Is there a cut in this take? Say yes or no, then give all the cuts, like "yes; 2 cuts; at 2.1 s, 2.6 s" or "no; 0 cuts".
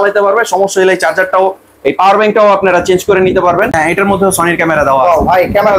yes; 1 cut; at 3.7 s